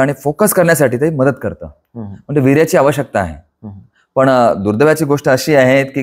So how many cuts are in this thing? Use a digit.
0